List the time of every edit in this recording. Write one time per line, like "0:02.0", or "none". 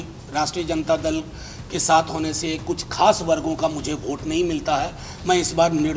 none